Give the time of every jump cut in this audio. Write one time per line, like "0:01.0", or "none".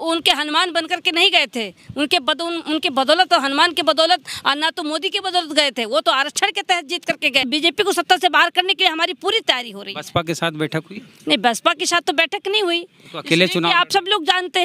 0:07.4